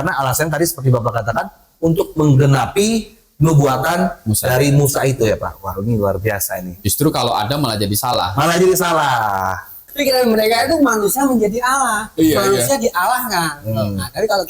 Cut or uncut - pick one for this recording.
cut